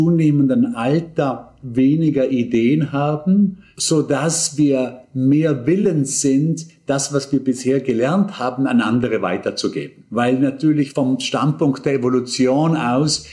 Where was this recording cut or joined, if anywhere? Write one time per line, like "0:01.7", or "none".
0:03.7
0:10.9